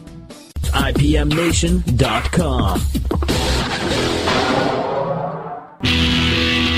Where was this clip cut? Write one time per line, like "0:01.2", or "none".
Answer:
0:05.6